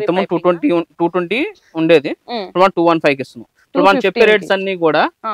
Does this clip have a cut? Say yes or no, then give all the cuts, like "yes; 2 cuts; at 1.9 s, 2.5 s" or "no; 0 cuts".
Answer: no; 0 cuts